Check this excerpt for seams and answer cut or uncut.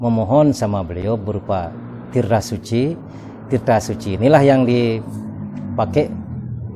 uncut